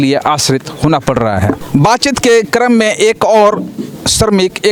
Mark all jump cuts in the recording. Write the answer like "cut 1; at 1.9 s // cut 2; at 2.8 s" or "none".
none